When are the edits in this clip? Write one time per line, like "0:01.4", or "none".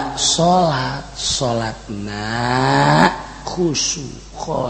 none